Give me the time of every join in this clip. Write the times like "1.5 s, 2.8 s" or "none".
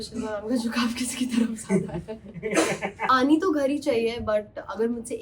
3.1 s